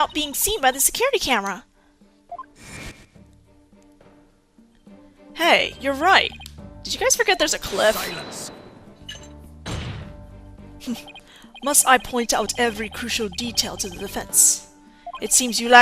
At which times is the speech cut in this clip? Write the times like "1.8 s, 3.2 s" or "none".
none